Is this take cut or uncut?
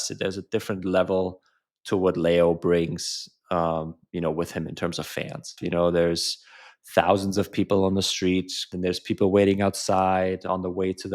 cut